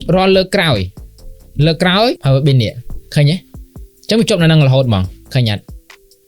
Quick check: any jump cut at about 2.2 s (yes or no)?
yes